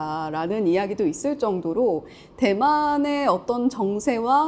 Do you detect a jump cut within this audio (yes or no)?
no